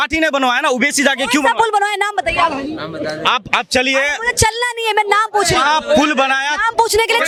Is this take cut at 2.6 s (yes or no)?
no